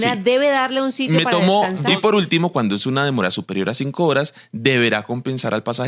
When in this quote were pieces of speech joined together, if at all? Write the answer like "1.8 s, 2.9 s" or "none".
1.9 s